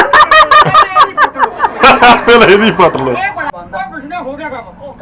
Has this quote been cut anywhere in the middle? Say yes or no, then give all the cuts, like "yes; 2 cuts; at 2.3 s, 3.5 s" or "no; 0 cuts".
yes; 1 cut; at 3.5 s